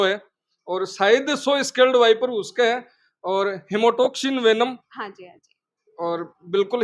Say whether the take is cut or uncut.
uncut